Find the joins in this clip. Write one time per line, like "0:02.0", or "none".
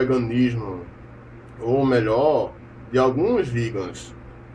0:02.7